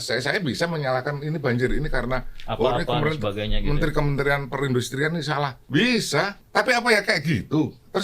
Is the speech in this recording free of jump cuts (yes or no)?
no